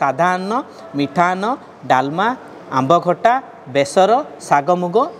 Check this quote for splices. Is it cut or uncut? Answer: uncut